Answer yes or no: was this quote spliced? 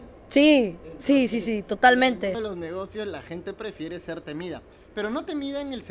no